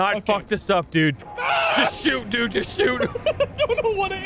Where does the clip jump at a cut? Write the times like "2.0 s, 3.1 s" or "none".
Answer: 1.3 s, 3.1 s